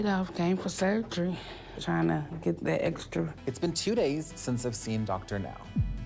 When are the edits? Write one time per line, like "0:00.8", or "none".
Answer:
0:03.4